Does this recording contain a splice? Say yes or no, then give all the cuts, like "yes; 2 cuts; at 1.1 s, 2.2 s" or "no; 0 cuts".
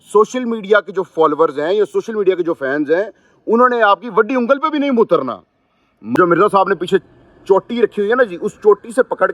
yes; 1 cut; at 6.2 s